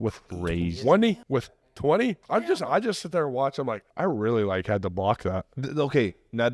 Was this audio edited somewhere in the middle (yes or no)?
yes